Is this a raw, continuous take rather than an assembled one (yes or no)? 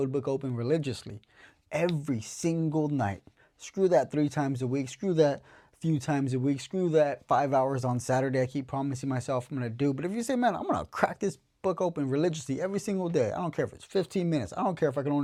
yes